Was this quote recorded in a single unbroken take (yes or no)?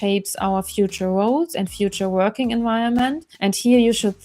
no